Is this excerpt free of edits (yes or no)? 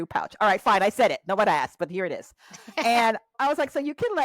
no